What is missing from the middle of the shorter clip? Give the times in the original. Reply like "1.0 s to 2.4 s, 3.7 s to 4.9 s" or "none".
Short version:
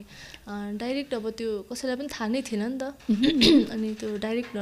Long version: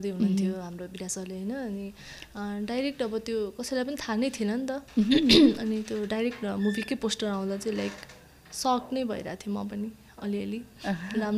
none